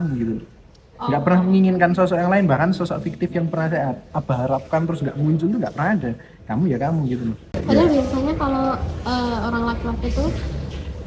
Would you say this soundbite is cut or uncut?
uncut